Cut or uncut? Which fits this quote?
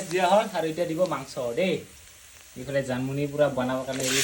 uncut